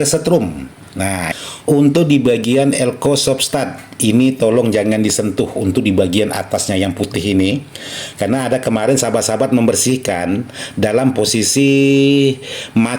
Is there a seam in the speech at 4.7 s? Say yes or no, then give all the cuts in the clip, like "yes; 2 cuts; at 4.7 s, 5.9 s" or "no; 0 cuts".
no; 1 cut; at 1.3 s